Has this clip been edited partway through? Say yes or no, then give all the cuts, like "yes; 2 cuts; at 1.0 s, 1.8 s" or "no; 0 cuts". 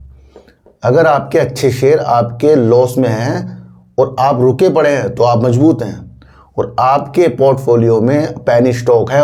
no; 0 cuts